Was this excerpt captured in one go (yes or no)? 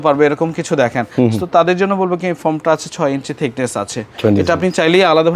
yes